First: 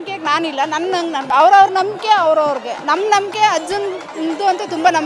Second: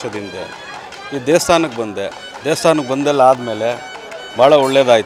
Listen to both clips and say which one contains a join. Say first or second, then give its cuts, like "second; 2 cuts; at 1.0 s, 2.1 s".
first; 1 cut; at 1.3 s